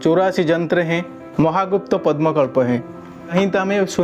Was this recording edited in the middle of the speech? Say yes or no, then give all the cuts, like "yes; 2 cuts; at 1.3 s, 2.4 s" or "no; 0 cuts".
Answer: yes; 2 cuts; at 1.2 s, 3.3 s